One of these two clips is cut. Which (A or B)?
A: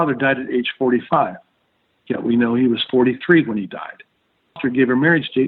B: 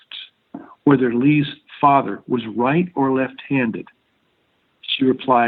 A